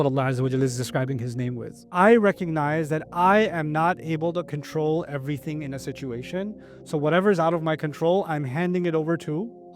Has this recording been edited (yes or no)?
yes